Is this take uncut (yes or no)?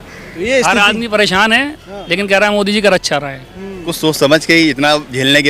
no